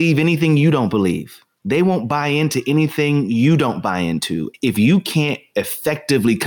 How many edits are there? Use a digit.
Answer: 1